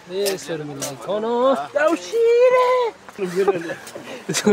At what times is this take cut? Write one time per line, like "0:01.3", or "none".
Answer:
0:03.1